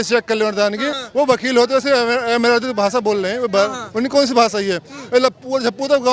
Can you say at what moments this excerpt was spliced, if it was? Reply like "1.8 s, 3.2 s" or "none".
0.9 s